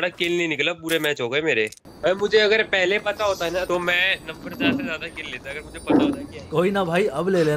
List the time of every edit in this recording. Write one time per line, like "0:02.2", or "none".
0:01.8
0:03.7
0:06.4